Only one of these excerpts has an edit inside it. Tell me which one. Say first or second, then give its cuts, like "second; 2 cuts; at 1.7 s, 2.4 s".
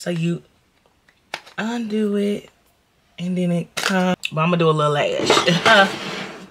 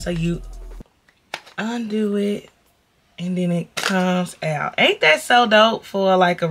first; 1 cut; at 4.1 s